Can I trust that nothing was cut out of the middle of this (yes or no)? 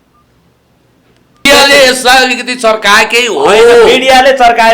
no